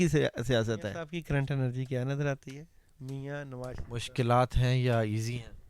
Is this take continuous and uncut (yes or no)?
no